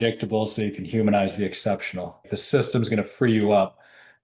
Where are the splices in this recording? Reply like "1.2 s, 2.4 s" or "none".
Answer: 1.8 s